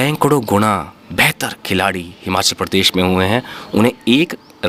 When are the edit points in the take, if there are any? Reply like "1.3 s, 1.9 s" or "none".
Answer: none

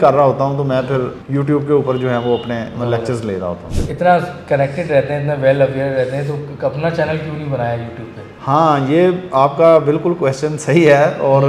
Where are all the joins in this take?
1.2 s

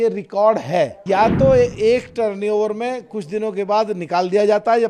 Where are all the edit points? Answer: 1.0 s

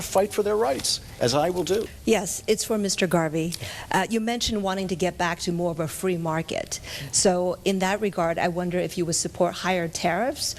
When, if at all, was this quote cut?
none

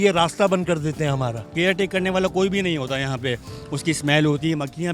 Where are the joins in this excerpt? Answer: 1.5 s

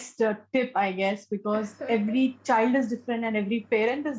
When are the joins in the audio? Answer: none

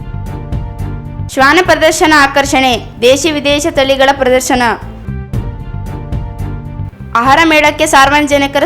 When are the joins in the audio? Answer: 5.0 s, 6.9 s

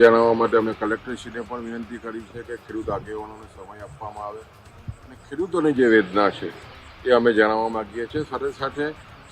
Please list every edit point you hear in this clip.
none

